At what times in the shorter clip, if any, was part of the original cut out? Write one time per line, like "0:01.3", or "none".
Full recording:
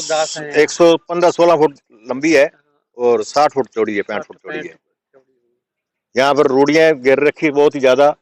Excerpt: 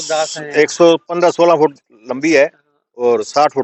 none